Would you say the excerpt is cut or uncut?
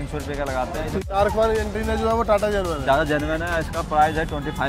cut